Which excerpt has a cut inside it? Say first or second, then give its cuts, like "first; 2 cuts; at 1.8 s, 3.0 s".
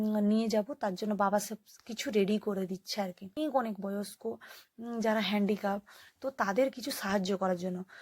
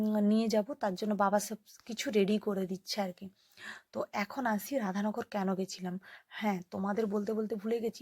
first; 1 cut; at 3.4 s